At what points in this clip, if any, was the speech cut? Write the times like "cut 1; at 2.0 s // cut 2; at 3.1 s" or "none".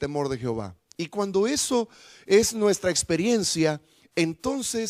none